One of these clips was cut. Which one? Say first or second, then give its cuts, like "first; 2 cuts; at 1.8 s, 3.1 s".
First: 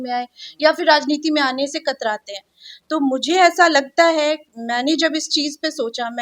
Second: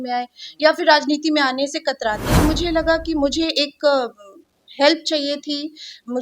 second; 1 cut; at 2.4 s